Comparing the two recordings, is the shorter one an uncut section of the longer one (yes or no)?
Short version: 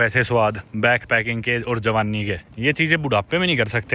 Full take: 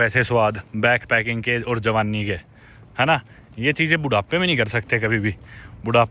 no